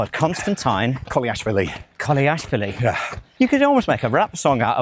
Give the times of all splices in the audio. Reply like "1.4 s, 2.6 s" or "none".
3.2 s